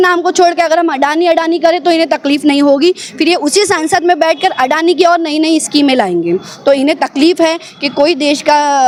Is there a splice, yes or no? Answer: no